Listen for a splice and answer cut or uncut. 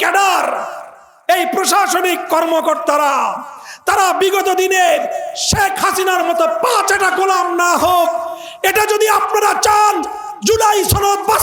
uncut